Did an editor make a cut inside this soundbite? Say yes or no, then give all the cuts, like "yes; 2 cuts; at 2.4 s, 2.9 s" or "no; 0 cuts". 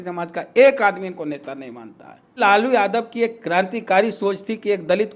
yes; 1 cut; at 2.4 s